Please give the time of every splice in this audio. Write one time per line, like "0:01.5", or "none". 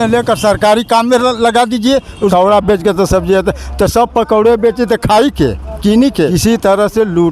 0:02.3
0:06.4